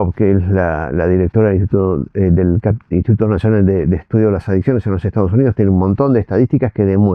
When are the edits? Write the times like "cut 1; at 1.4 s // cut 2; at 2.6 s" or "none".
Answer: none